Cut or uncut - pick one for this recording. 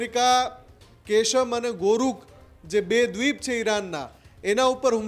uncut